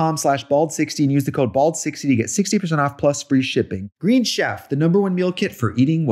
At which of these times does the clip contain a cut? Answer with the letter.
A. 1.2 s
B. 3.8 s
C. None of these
B